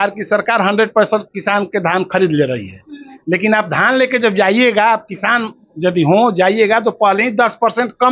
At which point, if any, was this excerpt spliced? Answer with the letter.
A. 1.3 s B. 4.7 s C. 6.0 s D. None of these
D